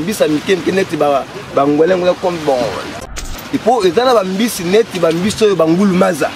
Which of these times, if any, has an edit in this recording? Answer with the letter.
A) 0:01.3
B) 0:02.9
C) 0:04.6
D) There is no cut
B